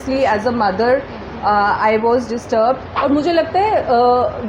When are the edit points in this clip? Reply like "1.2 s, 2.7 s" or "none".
2.9 s